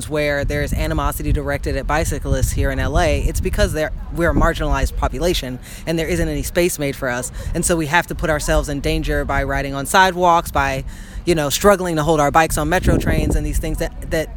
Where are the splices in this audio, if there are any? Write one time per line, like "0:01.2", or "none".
none